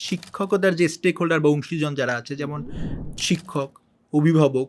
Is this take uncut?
no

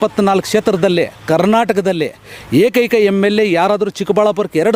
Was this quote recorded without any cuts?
yes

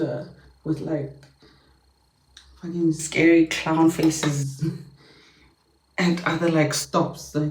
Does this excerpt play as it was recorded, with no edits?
yes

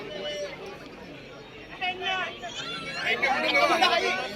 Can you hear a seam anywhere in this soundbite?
no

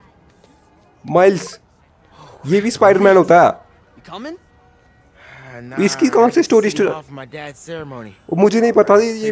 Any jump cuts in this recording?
no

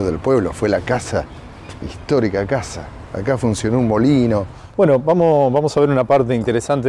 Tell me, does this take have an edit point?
yes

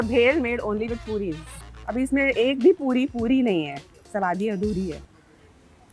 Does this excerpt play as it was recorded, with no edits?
yes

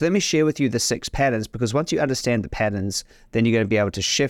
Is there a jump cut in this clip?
no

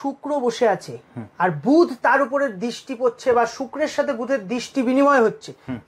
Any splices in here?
no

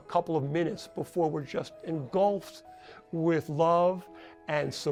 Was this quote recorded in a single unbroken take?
yes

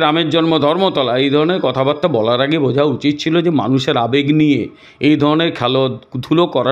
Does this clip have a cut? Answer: no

